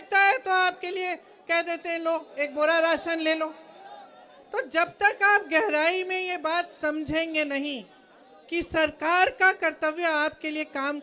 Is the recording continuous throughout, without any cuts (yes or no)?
yes